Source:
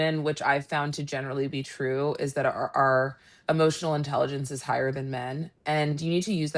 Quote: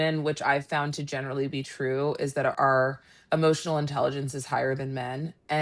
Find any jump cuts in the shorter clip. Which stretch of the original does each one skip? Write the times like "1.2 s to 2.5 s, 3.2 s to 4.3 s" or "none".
2.5 s to 2.7 s